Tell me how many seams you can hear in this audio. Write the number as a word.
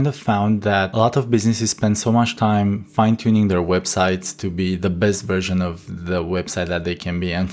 one